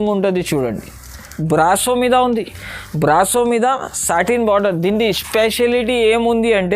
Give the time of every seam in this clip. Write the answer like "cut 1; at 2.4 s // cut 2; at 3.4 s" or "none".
cut 1; at 1.3 s